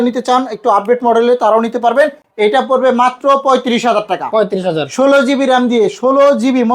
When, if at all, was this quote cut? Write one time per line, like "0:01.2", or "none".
none